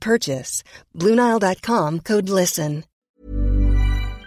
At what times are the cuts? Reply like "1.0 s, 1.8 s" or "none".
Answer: 2.9 s